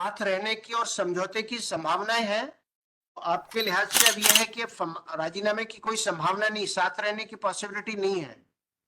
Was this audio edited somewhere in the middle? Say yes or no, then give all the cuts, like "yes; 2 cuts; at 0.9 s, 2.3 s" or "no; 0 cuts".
yes; 1 cut; at 3.2 s